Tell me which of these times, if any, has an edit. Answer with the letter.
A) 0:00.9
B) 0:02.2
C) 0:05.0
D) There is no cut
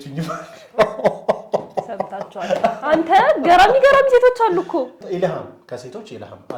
C